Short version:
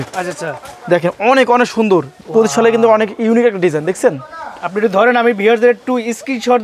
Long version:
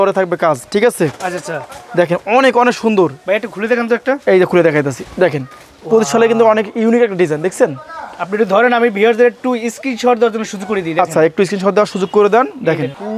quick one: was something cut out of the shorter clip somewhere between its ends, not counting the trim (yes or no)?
yes